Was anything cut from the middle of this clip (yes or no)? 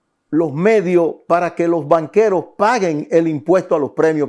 no